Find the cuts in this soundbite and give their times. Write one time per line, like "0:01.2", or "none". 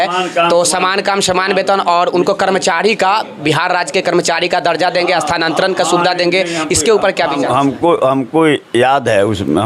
none